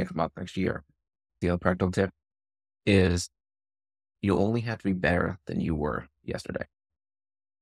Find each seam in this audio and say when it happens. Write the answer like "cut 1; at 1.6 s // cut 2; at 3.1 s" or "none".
cut 1; at 1.4 s // cut 2; at 4.0 s